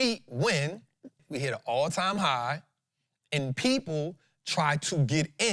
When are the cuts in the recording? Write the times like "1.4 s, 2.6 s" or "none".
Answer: 1.2 s

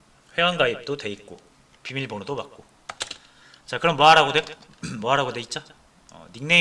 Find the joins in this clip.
1.0 s

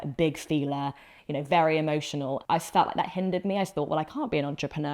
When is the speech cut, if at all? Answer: 2.4 s

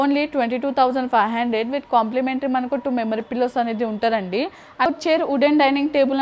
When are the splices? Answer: 4.9 s

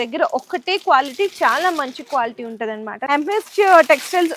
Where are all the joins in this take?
2.9 s

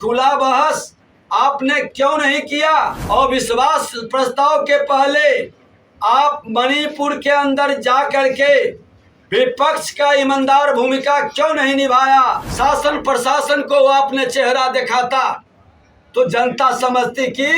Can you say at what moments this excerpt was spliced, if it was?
3.0 s, 12.5 s

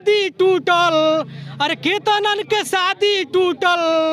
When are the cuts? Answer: none

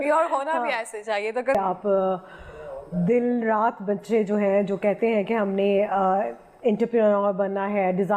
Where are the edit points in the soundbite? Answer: 1.5 s

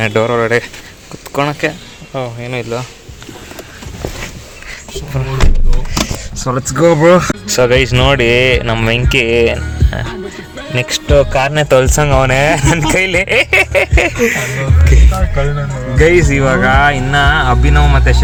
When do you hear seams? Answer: none

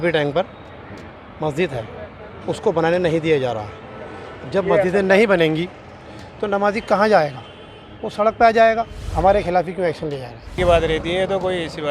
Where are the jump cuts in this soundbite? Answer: 9.0 s, 10.5 s

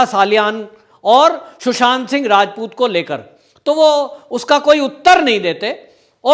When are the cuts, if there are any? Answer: none

